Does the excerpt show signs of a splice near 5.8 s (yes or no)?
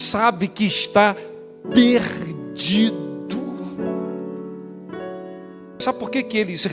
yes